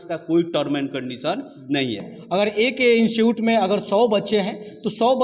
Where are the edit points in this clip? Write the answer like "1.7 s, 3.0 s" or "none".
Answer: 2.0 s